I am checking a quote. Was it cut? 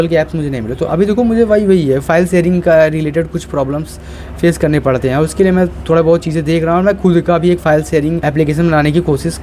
no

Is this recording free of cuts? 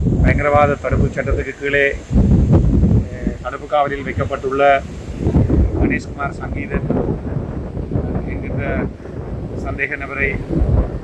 yes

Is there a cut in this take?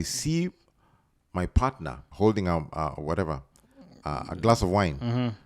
yes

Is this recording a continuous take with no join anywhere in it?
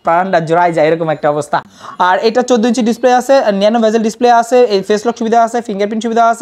yes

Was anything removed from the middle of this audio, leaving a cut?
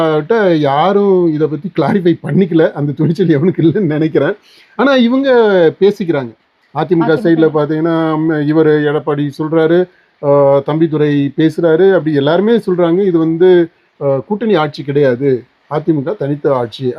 no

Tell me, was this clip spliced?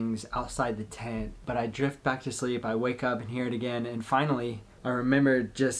yes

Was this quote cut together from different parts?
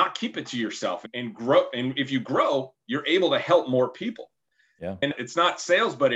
yes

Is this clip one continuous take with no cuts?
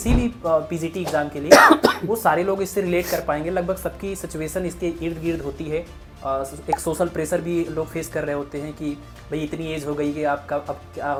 yes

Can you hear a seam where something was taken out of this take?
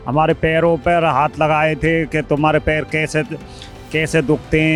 no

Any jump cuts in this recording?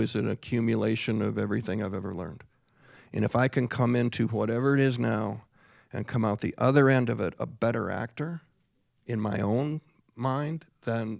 no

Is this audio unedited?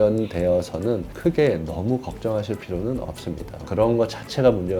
no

